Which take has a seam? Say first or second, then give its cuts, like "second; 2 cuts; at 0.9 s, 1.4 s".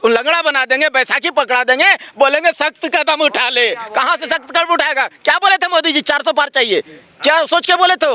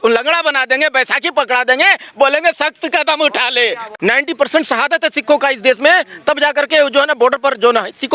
second; 1 cut; at 3.8 s